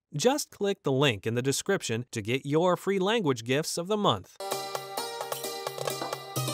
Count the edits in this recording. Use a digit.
1